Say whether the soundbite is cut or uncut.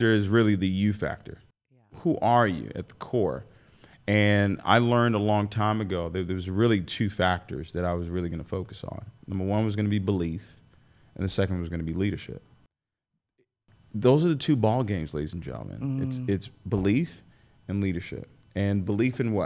cut